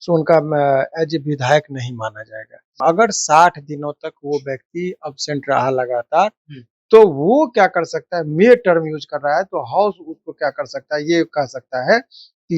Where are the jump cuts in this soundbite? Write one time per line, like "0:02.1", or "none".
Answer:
0:02.7